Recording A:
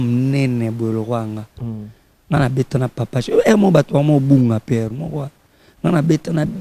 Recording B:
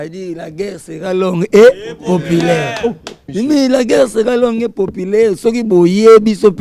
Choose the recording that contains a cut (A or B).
B